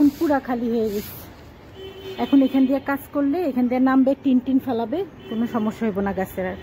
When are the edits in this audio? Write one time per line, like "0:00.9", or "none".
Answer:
none